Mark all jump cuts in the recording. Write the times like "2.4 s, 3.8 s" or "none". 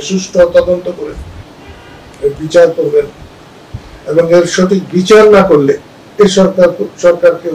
6.0 s